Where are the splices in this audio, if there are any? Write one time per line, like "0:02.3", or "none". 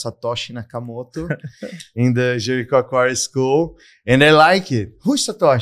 none

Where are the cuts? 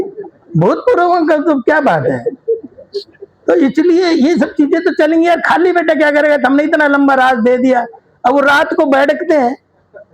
none

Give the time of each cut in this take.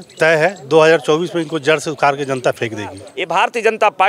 0:03.1

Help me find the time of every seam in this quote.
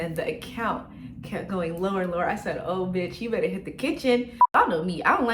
0:04.4

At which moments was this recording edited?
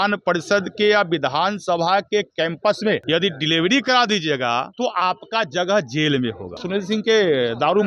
0:03.0
0:04.7
0:06.6

